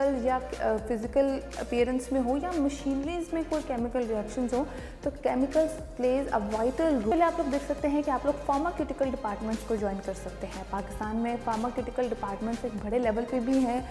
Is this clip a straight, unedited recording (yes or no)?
no